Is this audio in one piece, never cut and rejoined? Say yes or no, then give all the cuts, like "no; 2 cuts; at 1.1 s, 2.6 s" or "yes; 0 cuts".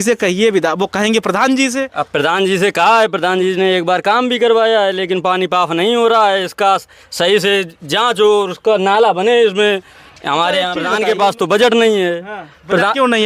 no; 1 cut; at 10.9 s